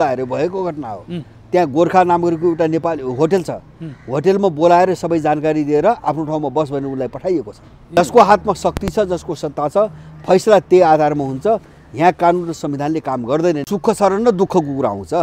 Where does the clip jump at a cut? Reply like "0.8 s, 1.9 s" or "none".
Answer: 8.0 s, 13.6 s